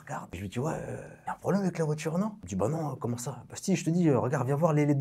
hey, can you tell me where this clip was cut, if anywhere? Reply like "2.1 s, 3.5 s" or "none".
2.4 s